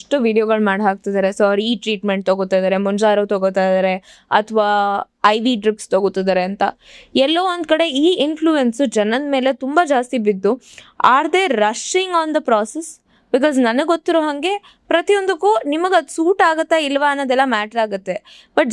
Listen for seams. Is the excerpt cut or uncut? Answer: uncut